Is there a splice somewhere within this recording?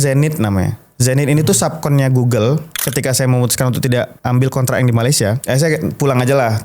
yes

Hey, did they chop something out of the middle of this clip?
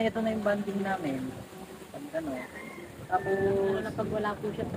no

